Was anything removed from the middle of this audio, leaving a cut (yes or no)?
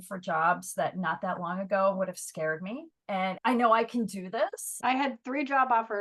yes